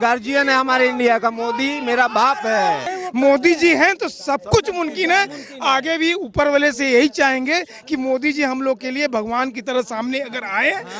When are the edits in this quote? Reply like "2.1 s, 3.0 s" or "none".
2.8 s